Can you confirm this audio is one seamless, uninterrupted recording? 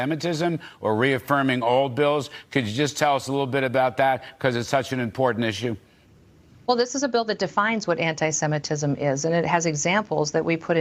yes; 0 cuts

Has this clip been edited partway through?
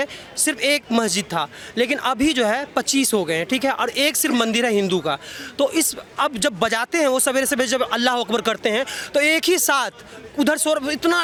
no; 0 cuts

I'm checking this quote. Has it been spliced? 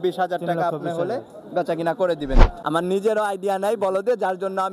yes; 1 cut; at 2.6 s

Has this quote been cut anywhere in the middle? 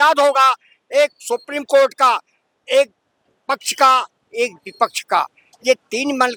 no; 0 cuts

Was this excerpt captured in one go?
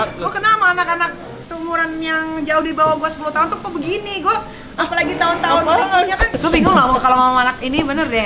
no; 1 cut; at 6.3 s

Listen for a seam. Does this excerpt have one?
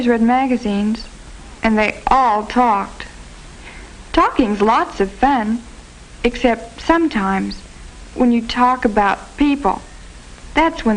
no; 0 cuts

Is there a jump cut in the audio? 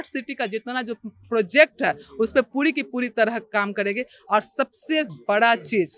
no; 0 cuts

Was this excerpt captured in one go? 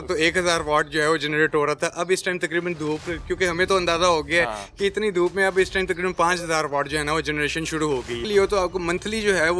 no; 1 cut; at 8.2 s

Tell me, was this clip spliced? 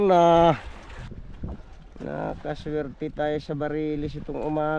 yes; 1 cut; at 1.0 s

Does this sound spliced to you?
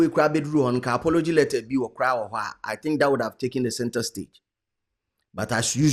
no; 0 cuts

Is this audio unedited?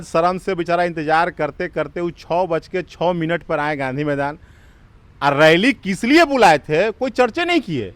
yes; 0 cuts

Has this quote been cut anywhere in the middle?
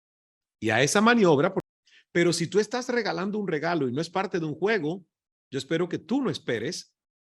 yes; 1 cut; at 1.7 s

